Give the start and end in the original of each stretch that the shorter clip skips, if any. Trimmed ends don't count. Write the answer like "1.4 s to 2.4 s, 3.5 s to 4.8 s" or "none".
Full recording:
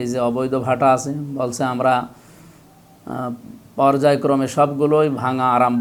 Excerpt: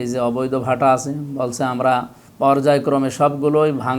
2.2 s to 3.6 s

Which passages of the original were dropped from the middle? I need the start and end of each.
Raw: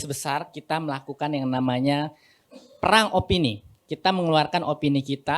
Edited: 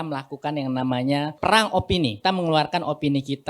2.1 s to 2.7 s, 3.6 s to 4.0 s

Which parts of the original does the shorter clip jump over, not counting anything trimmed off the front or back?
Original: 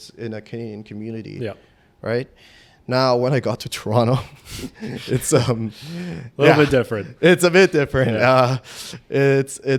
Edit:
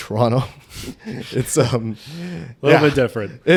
none

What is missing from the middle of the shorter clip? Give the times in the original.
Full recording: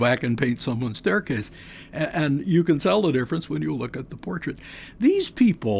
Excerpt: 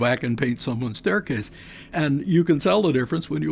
1.9 s to 2.1 s

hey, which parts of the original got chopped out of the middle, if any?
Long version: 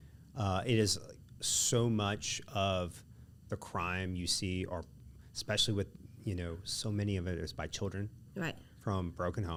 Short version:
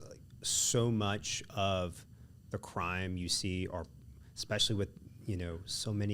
none

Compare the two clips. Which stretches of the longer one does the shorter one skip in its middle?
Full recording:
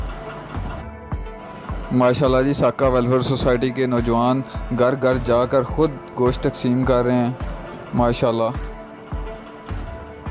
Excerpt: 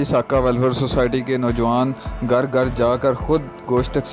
none

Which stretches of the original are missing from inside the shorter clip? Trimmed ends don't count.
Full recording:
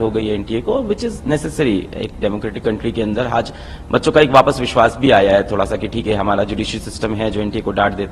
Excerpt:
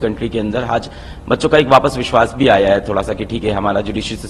none

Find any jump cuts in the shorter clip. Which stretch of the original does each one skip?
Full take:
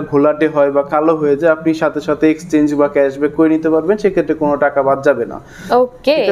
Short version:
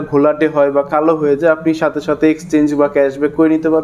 none

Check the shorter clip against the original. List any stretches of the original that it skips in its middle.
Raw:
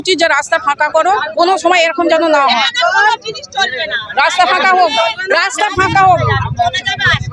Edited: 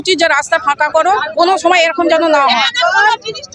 none

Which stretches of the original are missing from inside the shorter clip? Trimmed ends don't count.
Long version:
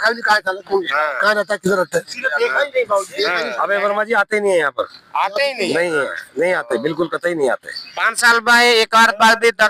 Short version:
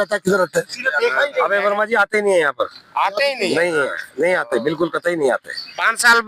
2.8 s to 3.6 s

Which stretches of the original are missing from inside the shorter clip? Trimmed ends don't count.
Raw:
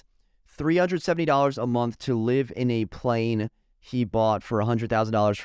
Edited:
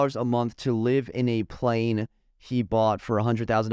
none

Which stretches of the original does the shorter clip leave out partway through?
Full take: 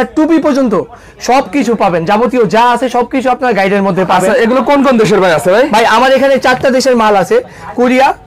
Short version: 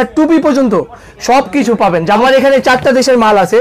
2.2 s to 6.0 s

